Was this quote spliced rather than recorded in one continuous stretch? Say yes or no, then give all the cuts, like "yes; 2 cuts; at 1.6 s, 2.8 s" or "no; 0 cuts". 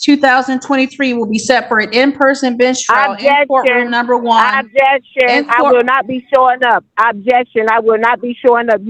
no; 0 cuts